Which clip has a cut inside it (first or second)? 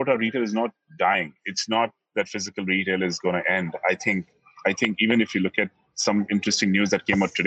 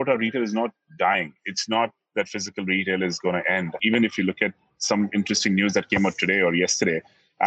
second